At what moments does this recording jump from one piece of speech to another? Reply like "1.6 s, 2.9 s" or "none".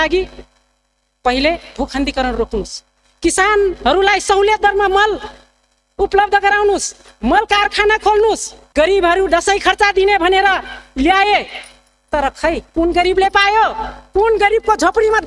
8.5 s